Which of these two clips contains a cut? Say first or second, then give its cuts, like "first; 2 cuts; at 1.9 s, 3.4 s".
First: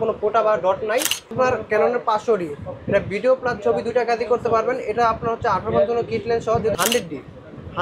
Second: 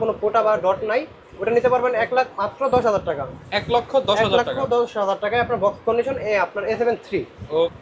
first; 2 cuts; at 1.3 s, 6.7 s